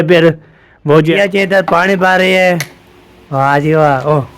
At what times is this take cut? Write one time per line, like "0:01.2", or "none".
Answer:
0:01.1